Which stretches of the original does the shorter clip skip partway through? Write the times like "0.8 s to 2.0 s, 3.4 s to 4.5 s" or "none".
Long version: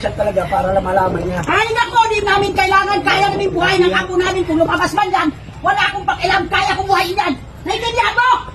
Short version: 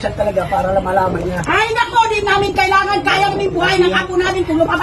none